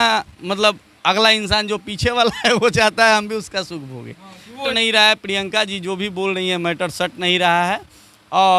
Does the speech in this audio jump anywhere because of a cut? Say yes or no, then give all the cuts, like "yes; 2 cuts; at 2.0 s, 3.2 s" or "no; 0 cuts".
yes; 1 cut; at 4.7 s